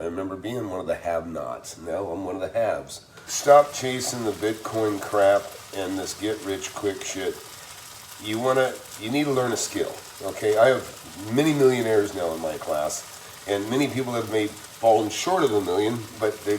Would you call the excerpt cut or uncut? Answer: cut